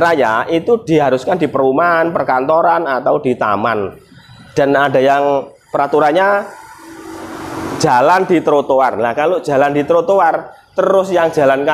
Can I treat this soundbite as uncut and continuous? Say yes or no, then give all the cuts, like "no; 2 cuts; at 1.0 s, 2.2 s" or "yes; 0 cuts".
yes; 0 cuts